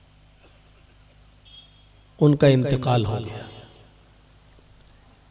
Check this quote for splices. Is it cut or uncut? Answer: uncut